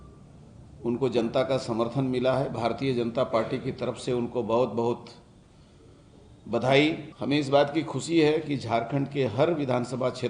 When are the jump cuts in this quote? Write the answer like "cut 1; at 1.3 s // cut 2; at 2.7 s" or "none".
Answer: cut 1; at 7.1 s